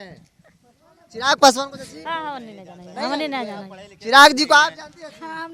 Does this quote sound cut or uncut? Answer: uncut